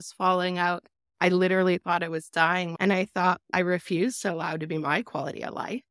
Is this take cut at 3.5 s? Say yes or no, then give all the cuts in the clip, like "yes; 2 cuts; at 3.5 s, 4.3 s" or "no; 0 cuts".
yes; 2 cuts; at 2.7 s, 3.5 s